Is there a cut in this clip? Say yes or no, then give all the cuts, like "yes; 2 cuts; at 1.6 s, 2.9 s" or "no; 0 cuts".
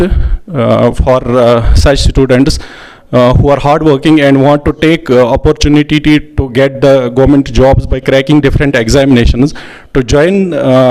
no; 0 cuts